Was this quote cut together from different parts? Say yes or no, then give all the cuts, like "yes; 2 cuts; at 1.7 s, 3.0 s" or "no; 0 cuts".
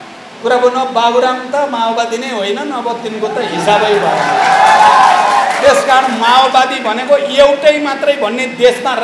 no; 0 cuts